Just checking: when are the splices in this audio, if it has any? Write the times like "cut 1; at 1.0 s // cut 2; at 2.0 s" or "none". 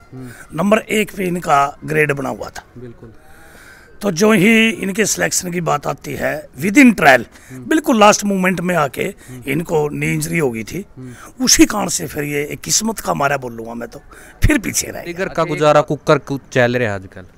cut 1; at 15.3 s